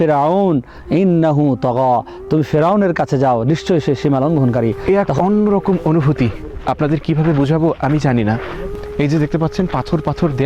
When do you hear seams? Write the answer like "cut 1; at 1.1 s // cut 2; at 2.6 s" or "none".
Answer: cut 1; at 4.8 s // cut 2; at 8.7 s